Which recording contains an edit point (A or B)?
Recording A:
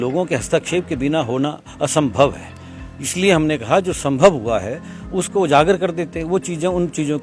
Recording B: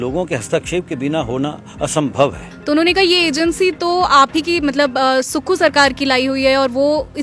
B